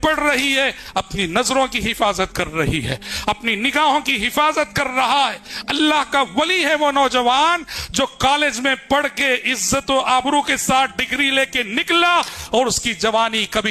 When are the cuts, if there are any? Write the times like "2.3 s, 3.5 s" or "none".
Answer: none